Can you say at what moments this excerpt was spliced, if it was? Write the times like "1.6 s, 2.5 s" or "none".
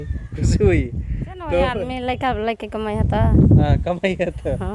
1.9 s